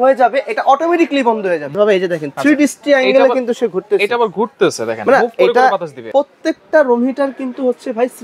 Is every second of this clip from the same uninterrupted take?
no; 2 cuts; at 1.7 s, 6.1 s

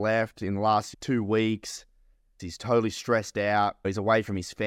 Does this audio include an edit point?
yes; 3 cuts; at 0.9 s, 2.4 s, 3.8 s

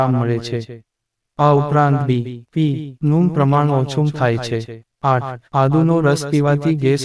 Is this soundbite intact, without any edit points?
no; 1 cut; at 5.1 s

